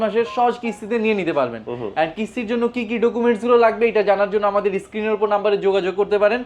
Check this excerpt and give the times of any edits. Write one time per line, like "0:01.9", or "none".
none